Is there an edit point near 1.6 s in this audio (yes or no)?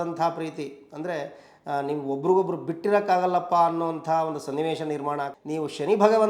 no